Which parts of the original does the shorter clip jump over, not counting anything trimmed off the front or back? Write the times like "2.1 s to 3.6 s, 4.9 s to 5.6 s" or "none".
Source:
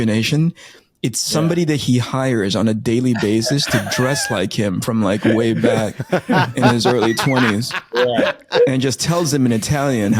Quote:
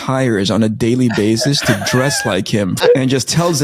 4.8 s to 8.5 s